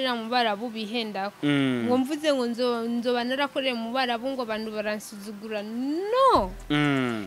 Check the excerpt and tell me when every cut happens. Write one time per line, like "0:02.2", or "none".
none

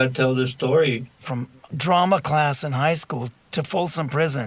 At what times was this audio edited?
0:01.6
0:03.4

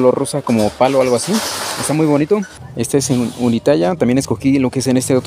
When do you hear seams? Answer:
0:02.6

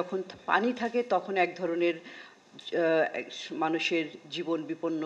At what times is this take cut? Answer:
none

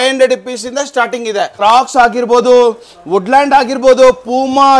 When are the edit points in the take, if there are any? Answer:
0:01.5

